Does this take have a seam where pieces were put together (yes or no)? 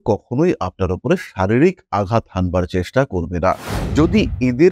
yes